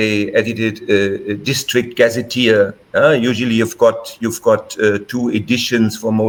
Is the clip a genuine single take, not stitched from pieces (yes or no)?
yes